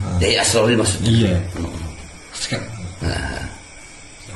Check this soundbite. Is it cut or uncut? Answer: uncut